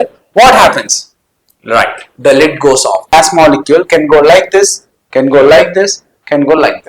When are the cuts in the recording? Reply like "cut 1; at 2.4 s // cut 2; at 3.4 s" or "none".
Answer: cut 1; at 3.1 s